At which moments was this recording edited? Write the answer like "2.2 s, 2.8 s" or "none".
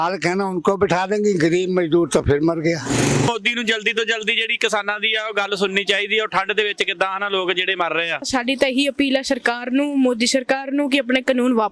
3.3 s, 8.2 s